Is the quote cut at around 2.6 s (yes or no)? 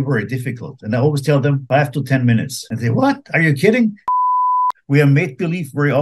yes